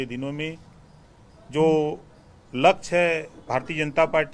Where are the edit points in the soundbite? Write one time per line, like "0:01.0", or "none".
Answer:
none